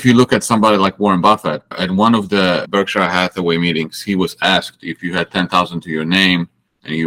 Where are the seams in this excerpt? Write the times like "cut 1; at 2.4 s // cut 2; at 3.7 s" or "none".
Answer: cut 1; at 1.7 s // cut 2; at 2.6 s

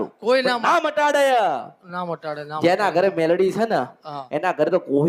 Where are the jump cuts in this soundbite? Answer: none

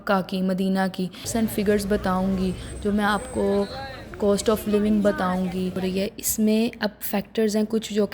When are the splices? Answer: cut 1; at 1.2 s // cut 2; at 5.8 s

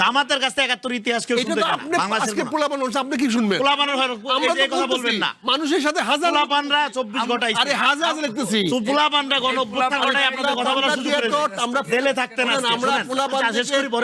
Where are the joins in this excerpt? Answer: none

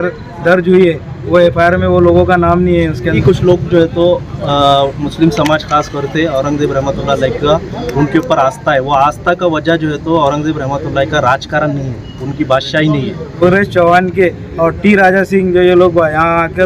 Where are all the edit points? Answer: cut 1; at 3.2 s // cut 2; at 13.3 s

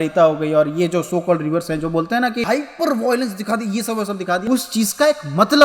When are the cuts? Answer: cut 1; at 4.5 s

